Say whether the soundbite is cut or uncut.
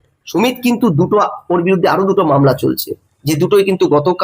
uncut